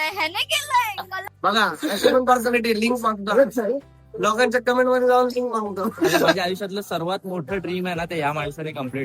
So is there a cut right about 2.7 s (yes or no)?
no